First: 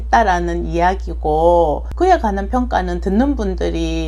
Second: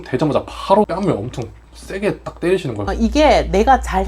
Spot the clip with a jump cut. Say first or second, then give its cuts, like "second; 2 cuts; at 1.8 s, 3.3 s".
second; 2 cuts; at 0.9 s, 3.0 s